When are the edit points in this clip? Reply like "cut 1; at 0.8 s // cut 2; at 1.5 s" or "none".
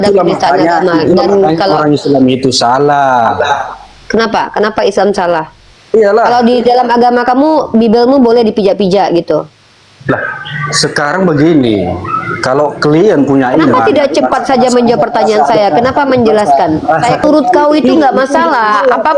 cut 1; at 17.2 s